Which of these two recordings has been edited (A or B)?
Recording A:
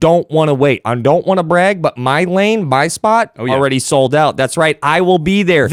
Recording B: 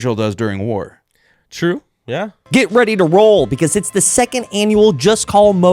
B